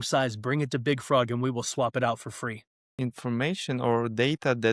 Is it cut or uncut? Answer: cut